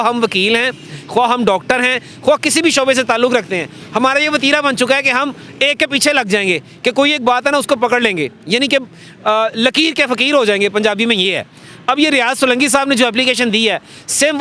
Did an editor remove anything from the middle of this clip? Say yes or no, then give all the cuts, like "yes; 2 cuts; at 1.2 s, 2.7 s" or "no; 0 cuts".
no; 0 cuts